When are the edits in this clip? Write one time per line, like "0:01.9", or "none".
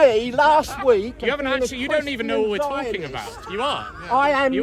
none